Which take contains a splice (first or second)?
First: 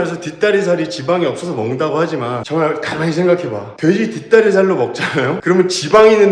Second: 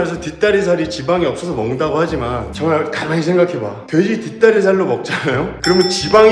first